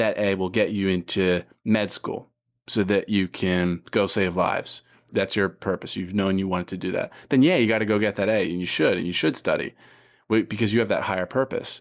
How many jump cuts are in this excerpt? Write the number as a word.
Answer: one